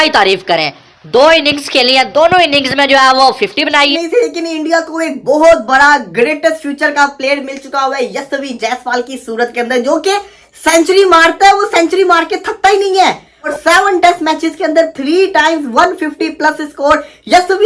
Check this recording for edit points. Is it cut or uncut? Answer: cut